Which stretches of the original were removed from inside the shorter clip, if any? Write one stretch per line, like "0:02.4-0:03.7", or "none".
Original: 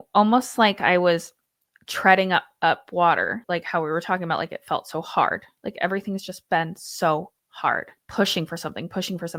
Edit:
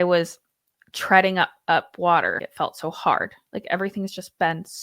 0:03.4-0:04.5